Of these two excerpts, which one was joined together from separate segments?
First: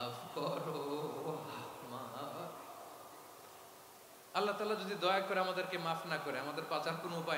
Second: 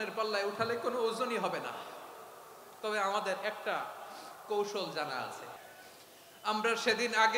second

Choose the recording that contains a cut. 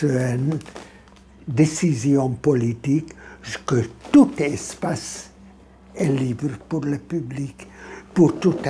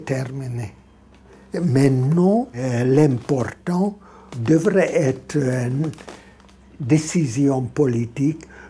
second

